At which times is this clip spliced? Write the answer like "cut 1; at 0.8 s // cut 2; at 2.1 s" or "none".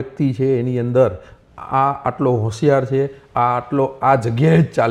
none